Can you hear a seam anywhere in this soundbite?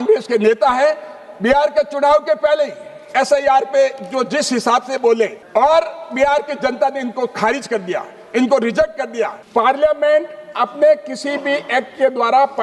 yes; 1 cut; at 9.4 s

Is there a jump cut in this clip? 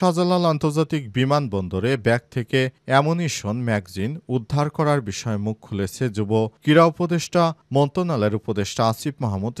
no; 0 cuts

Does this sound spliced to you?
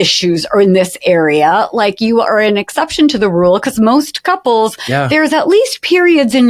no; 0 cuts

